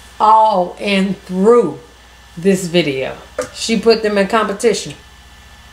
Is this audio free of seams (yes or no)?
no